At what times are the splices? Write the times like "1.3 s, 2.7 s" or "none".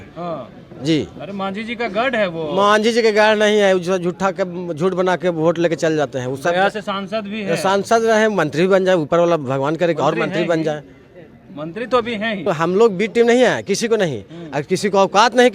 12.5 s